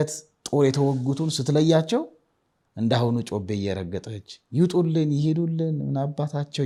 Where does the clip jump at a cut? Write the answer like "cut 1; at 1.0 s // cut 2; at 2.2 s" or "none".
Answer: none